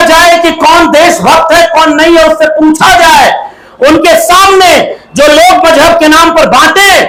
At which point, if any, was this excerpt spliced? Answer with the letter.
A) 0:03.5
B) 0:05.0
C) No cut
C